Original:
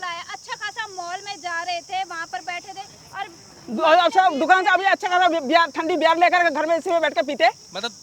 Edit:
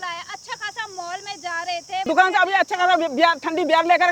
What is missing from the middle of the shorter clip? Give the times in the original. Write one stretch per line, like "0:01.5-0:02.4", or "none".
0:02.0-0:04.4

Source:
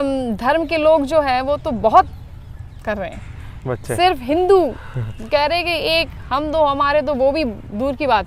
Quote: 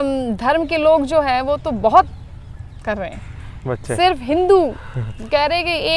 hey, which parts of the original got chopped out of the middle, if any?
none

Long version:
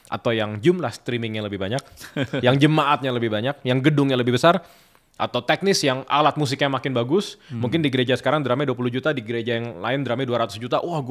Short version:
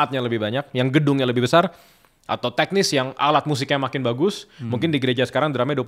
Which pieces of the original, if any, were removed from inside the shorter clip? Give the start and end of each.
none

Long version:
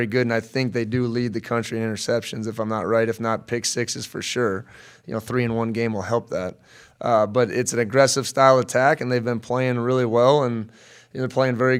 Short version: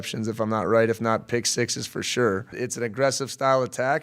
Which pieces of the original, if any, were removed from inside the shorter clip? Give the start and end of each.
0:04.7-0:07.5

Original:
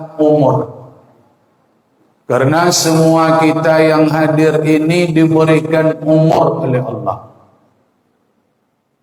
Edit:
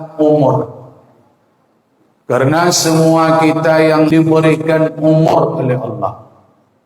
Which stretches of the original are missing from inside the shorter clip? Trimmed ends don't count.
0:04.1-0:05.1

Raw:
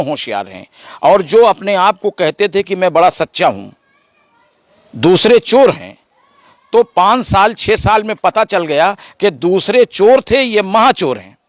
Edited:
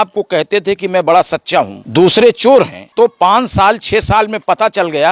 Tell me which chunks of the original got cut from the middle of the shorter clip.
0:03.7-0:04.9
0:05.9-0:06.6

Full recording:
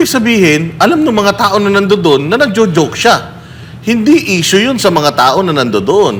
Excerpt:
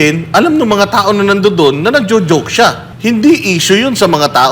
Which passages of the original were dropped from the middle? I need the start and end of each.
0:03.3-0:03.7

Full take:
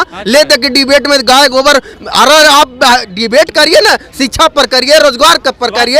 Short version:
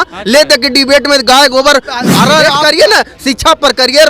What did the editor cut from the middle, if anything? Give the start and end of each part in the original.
0:02.4-0:03.3

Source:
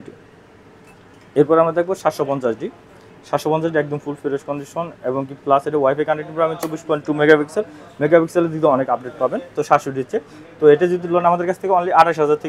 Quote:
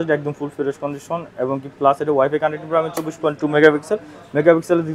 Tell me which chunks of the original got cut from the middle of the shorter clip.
none

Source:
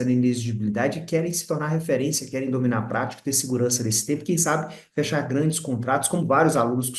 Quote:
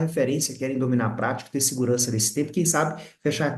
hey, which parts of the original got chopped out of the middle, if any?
none

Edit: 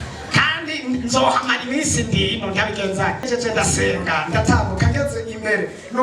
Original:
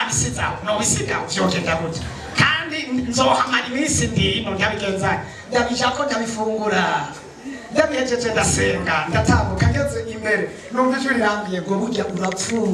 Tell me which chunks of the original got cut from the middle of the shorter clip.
0:05.3-0:08.1

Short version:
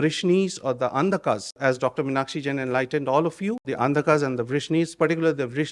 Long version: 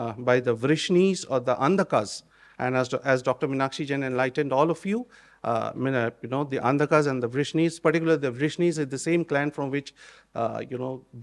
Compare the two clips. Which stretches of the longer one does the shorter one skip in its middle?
0:02.2-0:03.0
0:05.1-0:06.5

